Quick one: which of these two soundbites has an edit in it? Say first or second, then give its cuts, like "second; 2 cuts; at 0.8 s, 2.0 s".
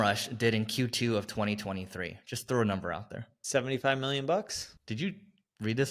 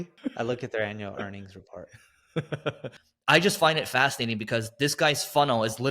second; 1 cut; at 3.0 s